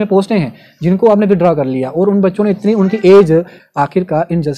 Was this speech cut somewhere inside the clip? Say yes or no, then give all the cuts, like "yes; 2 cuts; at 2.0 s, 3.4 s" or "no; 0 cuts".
yes; 1 cut; at 3.6 s